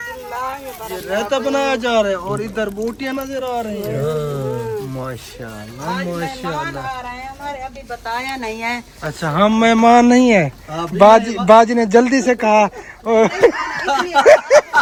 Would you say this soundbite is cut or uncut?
uncut